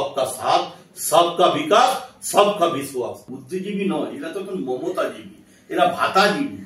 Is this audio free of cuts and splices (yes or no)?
no